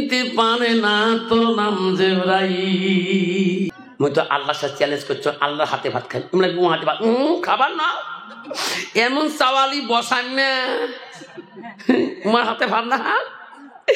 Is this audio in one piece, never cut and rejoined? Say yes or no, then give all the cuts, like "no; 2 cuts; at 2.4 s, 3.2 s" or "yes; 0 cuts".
no; 1 cut; at 3.7 s